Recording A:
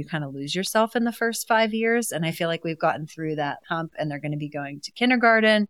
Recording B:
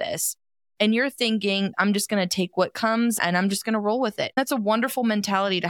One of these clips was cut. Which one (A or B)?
B